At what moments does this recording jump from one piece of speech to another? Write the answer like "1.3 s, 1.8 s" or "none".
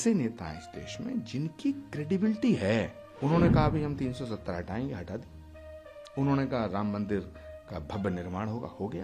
3.0 s